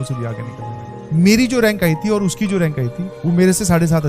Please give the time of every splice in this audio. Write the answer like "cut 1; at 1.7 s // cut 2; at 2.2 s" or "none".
cut 1; at 1.0 s // cut 2; at 3.1 s